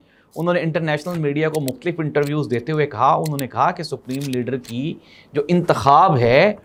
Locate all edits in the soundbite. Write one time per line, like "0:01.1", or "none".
none

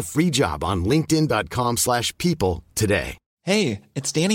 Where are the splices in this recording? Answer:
0:03.2

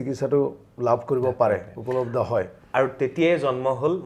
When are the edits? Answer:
none

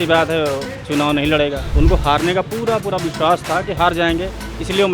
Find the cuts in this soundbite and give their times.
0:01.6

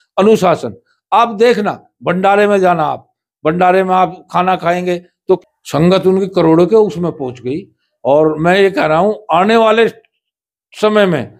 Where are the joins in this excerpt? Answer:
0:05.4

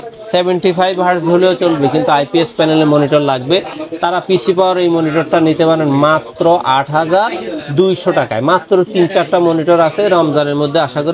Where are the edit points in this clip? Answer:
none

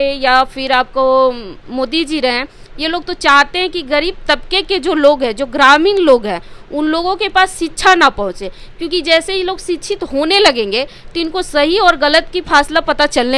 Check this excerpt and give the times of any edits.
none

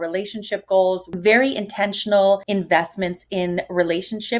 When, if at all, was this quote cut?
0:01.1
0:02.4

